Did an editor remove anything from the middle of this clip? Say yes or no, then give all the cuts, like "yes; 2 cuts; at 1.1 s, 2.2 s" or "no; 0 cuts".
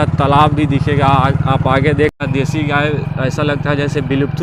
yes; 1 cut; at 2.1 s